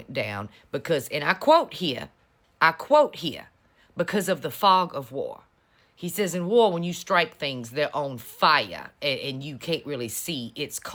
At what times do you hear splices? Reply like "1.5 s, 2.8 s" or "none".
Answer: none